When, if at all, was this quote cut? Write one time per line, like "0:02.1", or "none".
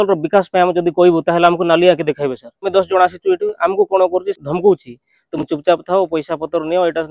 0:02.7
0:04.4